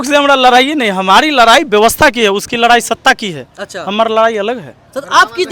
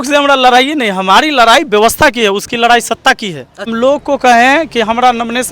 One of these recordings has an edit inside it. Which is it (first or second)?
second